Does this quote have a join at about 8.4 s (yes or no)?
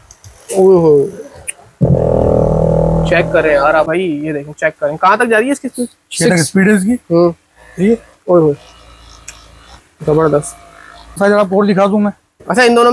no